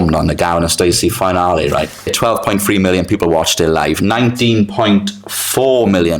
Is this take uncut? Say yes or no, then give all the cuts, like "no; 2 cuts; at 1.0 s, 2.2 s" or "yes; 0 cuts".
no; 1 cut; at 2.1 s